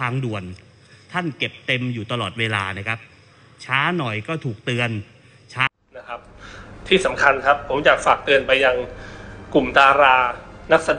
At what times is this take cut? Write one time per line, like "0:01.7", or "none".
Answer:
0:05.7